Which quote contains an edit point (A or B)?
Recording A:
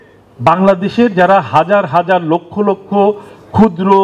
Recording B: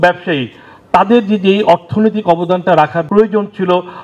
B